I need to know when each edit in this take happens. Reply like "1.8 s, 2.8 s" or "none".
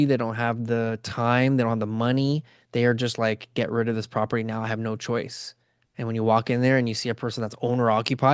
none